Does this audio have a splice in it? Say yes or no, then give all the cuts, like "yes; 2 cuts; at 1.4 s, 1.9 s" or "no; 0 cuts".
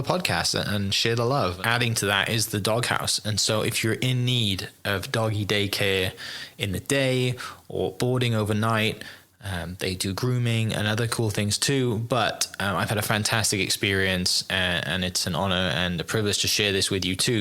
yes; 1 cut; at 1.6 s